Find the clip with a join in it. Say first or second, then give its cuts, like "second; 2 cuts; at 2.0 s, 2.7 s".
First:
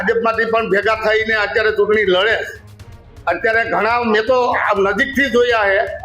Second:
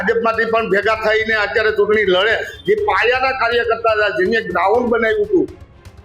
second; 1 cut; at 2.5 s